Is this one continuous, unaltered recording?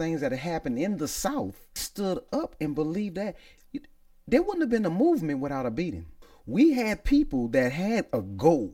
no; 2 cuts; at 1.8 s, 6.3 s

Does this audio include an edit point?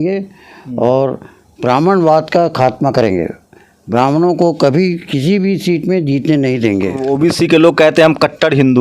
yes; 1 cut; at 7.1 s

